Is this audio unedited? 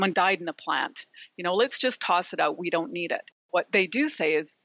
no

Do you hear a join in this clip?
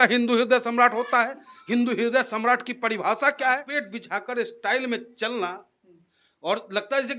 yes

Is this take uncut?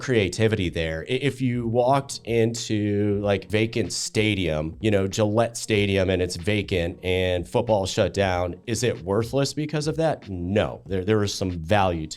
no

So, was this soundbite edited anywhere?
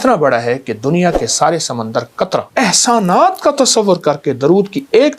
yes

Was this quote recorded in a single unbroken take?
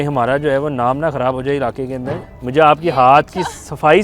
no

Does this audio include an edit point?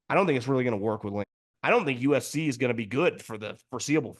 yes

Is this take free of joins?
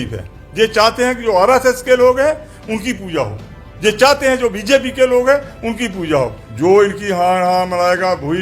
no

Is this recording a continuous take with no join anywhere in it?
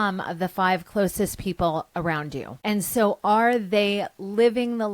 no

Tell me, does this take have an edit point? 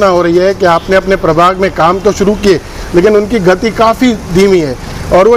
no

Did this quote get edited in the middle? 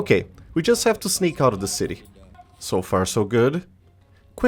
no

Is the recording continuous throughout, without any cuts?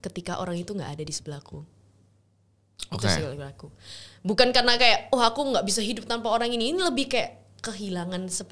yes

